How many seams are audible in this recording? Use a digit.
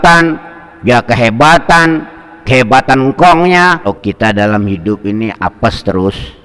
1